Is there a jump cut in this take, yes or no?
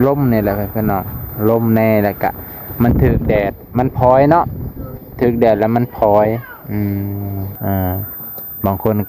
yes